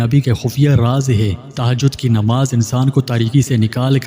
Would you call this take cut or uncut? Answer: cut